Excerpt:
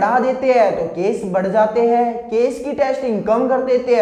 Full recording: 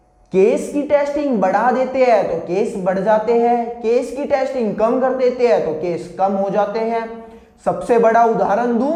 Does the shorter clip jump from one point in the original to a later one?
no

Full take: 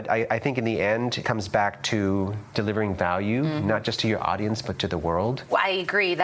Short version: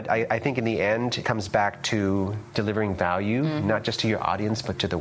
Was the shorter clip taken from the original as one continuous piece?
yes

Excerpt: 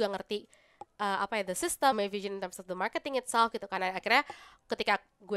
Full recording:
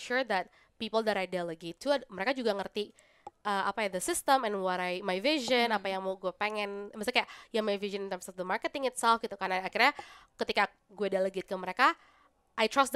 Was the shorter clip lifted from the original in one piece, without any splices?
no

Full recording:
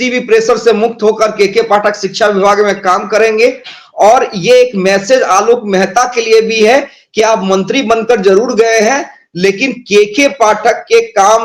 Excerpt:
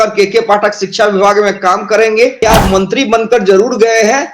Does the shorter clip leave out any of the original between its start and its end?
yes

